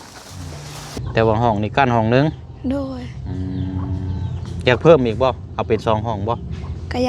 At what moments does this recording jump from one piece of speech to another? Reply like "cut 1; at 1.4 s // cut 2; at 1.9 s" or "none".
cut 1; at 1.0 s